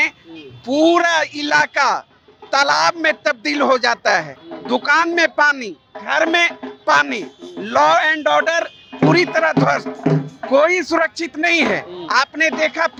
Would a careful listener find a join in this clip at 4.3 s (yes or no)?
no